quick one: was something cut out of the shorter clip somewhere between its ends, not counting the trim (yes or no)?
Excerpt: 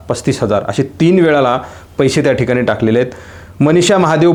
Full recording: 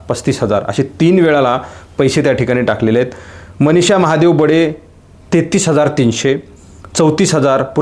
no